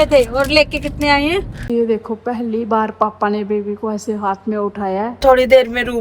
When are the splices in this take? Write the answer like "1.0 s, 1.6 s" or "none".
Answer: 1.7 s, 5.2 s